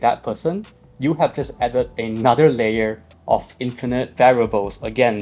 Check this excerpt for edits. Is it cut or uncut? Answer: cut